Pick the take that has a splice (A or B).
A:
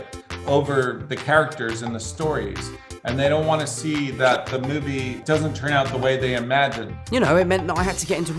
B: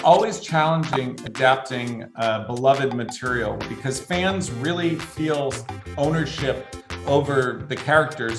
A